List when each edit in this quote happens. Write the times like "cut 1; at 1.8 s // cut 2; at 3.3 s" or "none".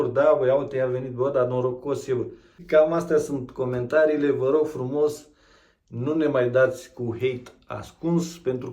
cut 1; at 2.6 s